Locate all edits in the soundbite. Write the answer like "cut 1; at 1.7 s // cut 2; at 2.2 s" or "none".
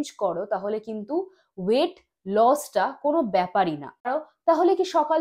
cut 1; at 4.1 s